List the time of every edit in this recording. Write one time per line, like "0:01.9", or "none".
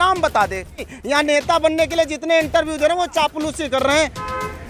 0:00.9